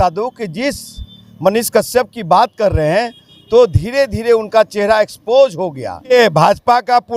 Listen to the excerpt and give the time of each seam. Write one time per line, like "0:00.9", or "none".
0:06.1